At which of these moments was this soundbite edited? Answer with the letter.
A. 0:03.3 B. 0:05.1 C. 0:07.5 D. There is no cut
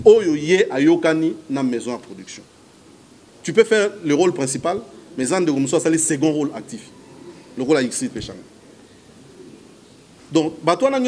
A